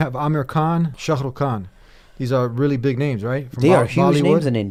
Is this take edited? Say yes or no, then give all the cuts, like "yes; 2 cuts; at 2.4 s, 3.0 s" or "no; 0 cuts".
no; 0 cuts